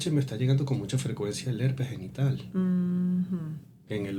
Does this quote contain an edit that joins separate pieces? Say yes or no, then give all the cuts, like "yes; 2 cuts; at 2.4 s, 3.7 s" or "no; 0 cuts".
no; 0 cuts